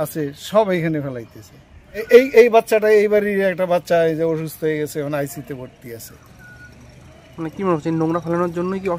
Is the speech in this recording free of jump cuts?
no; 1 cut; at 2.0 s

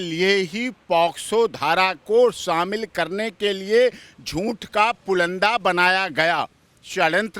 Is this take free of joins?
yes; 0 cuts

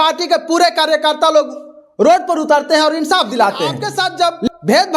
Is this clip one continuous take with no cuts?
no; 1 cut; at 3.9 s

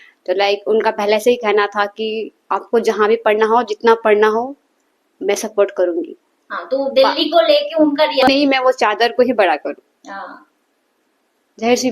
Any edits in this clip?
yes; 1 cut; at 8.3 s

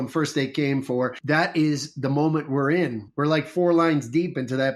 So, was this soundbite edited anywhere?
no; 0 cuts

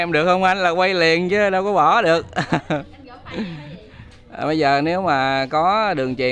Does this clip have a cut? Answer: no; 0 cuts

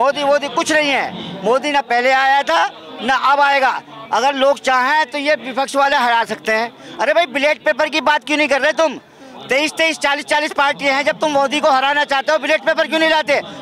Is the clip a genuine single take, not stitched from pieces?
yes; 0 cuts

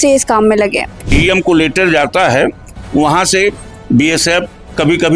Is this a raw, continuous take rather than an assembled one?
no; 1 cut; at 1.2 s

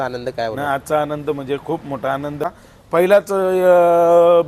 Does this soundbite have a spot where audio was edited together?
yes; 1 cut; at 2.4 s

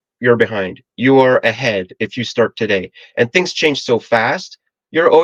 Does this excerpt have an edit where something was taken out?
no; 0 cuts

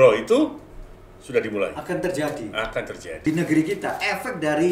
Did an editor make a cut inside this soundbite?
yes; 1 cut; at 3.1 s

